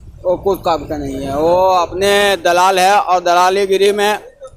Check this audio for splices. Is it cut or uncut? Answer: uncut